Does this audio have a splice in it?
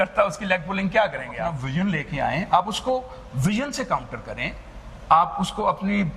yes; 1 cut; at 1.6 s

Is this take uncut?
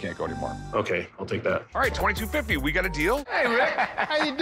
no; 1 cut; at 3.3 s

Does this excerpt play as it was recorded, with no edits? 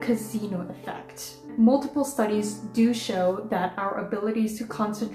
no; 1 cut; at 1.5 s

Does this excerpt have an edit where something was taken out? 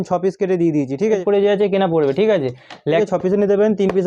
yes; 2 cuts; at 1.2 s, 3.0 s

